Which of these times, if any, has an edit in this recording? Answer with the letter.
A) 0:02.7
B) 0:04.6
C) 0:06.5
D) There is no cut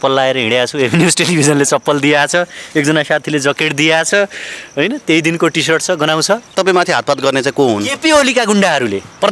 C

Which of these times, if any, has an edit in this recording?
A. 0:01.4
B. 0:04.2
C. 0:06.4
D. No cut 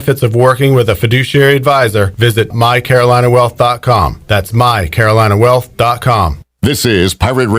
C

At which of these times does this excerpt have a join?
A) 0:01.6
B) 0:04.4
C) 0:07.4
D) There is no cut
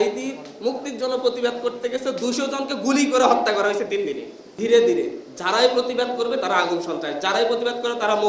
B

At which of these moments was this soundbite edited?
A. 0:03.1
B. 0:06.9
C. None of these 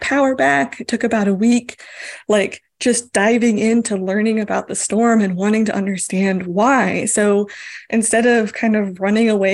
C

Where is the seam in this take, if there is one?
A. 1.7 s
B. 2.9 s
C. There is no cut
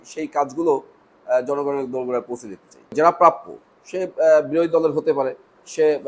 B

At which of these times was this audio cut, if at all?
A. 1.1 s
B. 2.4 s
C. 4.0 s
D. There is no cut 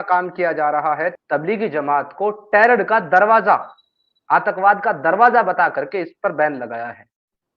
A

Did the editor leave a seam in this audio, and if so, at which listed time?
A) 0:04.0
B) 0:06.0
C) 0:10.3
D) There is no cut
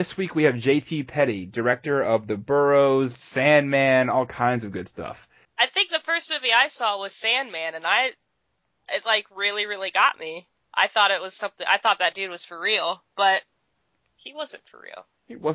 B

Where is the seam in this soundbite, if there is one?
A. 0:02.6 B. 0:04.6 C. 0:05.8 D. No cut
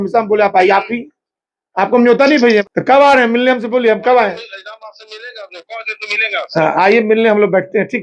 A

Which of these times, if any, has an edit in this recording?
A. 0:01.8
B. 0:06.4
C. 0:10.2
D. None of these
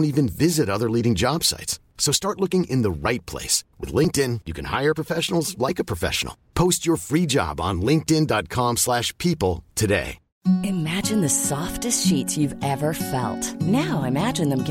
C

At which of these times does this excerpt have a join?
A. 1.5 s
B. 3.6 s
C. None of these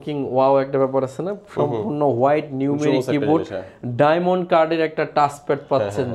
C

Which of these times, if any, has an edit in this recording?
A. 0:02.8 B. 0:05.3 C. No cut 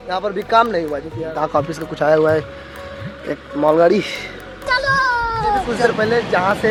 C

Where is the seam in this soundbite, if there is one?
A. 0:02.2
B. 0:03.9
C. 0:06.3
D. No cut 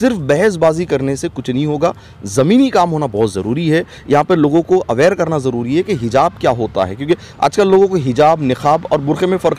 D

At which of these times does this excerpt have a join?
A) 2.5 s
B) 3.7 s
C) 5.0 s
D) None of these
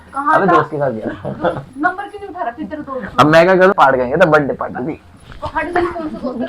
B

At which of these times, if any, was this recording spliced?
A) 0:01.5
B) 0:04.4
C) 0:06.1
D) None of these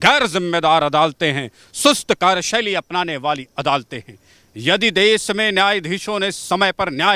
D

